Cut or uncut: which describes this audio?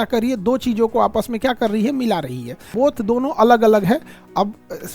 cut